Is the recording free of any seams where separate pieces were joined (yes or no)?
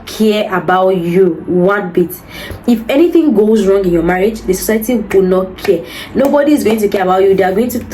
yes